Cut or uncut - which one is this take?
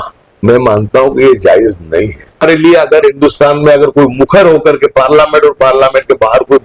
cut